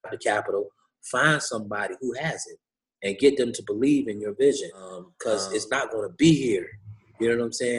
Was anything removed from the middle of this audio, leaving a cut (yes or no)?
yes